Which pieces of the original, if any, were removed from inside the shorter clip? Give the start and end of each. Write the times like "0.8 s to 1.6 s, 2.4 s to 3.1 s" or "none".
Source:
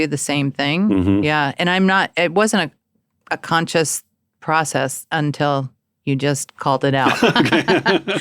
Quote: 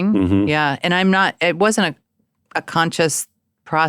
none